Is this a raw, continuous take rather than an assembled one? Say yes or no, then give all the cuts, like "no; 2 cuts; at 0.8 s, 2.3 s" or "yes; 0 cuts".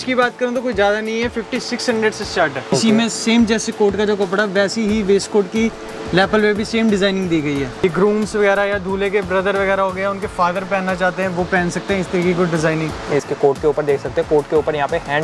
no; 3 cuts; at 2.7 s, 7.8 s, 13.2 s